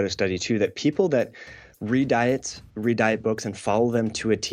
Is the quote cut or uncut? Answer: uncut